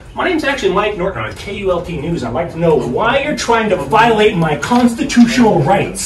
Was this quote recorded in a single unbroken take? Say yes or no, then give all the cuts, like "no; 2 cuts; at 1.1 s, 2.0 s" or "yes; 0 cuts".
yes; 0 cuts